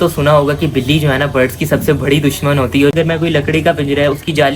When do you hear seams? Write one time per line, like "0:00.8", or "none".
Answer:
0:02.9